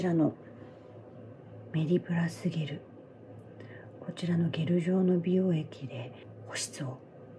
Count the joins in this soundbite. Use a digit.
1